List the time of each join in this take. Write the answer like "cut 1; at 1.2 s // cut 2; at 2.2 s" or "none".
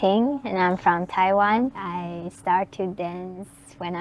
cut 1; at 1.9 s